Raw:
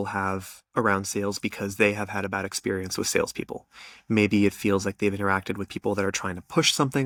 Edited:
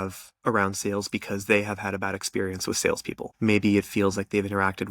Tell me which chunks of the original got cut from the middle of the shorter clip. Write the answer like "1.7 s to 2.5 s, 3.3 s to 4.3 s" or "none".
3.5 s to 3.9 s